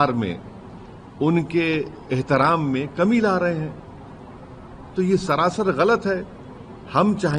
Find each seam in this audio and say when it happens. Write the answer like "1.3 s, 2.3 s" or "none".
none